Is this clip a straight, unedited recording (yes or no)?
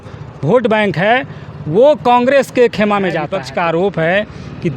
no